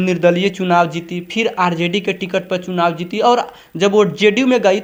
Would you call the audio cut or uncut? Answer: uncut